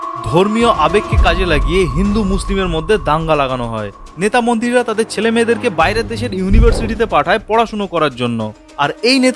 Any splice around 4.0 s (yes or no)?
yes